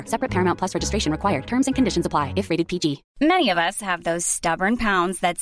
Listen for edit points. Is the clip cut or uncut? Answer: cut